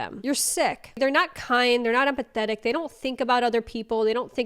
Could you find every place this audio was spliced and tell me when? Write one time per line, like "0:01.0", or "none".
0:00.9